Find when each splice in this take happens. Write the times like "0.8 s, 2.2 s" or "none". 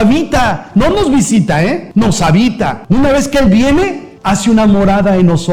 none